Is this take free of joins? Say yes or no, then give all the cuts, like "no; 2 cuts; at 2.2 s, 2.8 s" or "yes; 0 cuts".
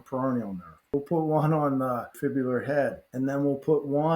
no; 3 cuts; at 0.9 s, 2.1 s, 3.0 s